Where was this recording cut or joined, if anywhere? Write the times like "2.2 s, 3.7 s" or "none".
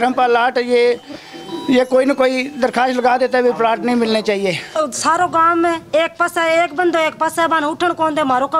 4.8 s